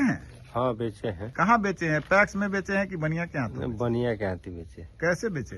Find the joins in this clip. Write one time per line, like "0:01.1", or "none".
0:01.2